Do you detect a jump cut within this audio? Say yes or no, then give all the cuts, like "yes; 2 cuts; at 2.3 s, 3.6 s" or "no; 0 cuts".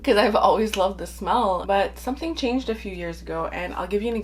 yes; 1 cut; at 1.6 s